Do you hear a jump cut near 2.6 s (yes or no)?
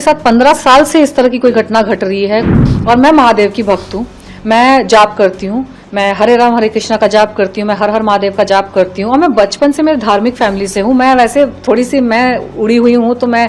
yes